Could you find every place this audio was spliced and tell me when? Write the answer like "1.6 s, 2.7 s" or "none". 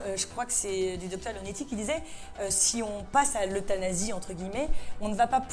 none